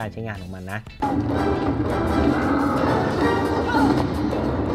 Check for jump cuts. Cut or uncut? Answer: cut